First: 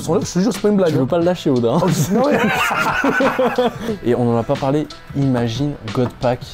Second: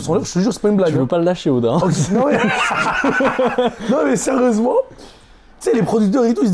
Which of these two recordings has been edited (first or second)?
first